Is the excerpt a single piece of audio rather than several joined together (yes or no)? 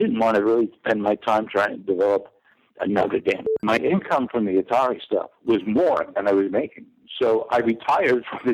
no